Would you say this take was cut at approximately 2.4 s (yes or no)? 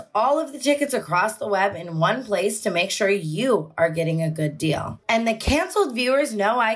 no